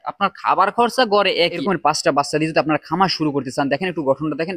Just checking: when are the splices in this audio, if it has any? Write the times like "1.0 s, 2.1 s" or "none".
1.6 s